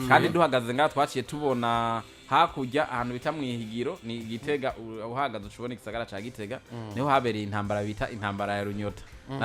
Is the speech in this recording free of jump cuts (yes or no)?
yes